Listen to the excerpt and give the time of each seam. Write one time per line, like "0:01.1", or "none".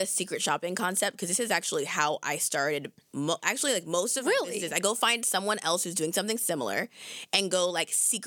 none